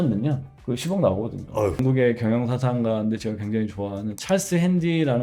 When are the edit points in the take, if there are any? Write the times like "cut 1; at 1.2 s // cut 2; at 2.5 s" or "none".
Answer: cut 1; at 1.8 s